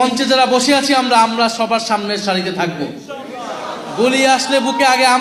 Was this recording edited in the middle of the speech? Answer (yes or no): no